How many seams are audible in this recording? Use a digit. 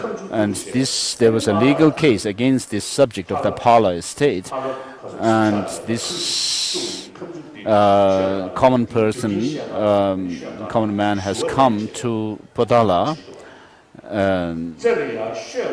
1